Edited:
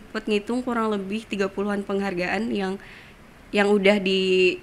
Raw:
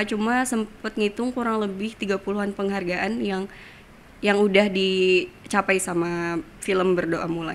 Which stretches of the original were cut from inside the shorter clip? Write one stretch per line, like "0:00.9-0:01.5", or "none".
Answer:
none

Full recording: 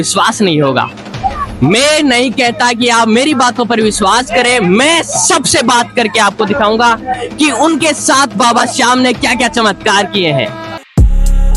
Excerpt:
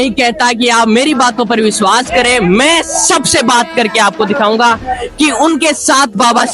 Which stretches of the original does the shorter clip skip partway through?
none

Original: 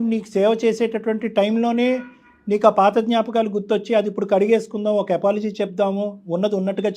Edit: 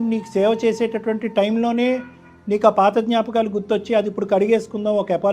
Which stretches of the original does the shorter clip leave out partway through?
none

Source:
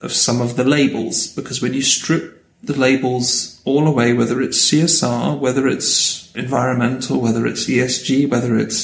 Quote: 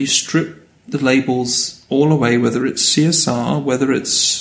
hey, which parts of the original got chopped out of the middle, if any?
none

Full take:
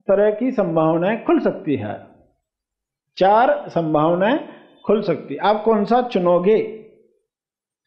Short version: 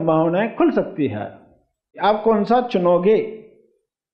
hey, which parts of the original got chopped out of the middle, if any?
0:02.6-0:05.3

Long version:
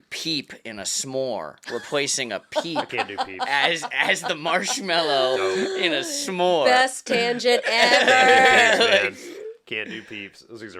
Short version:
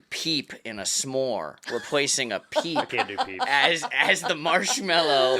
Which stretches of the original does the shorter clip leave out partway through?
none

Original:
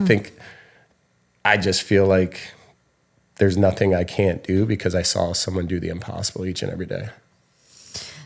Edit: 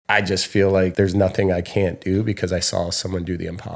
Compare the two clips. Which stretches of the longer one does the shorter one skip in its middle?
0:02.3-0:03.4

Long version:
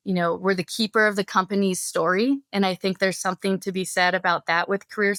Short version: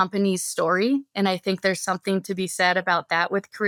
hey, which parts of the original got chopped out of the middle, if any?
none

